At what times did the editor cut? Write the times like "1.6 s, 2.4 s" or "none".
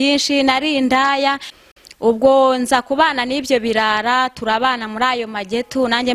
1.5 s